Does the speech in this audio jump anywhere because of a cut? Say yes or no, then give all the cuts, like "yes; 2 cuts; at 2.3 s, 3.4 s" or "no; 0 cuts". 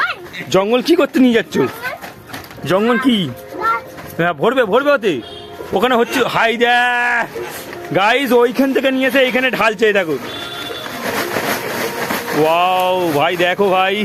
no; 0 cuts